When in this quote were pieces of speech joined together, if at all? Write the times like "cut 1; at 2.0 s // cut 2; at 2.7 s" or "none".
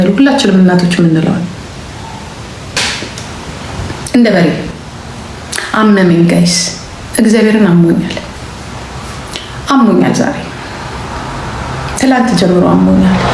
cut 1; at 3.9 s